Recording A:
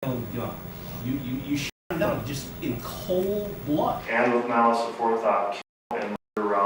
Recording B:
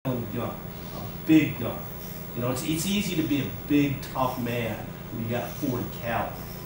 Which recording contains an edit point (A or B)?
A